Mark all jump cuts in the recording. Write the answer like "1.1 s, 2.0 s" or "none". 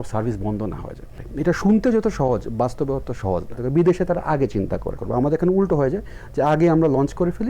1.2 s, 3.6 s, 5.0 s